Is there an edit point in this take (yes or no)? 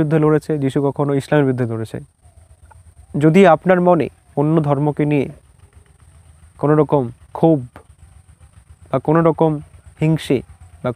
yes